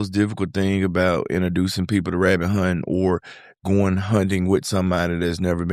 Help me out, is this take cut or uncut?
uncut